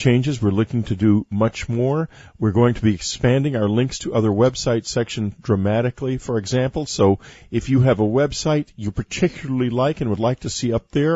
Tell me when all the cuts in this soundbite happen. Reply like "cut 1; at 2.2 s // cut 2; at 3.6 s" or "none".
cut 1; at 3.0 s